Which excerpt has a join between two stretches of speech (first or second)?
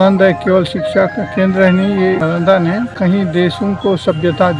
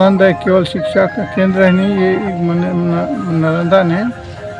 first